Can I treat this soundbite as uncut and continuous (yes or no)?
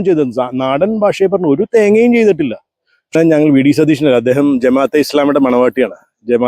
no